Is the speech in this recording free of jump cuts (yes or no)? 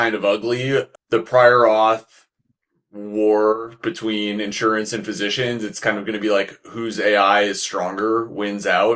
yes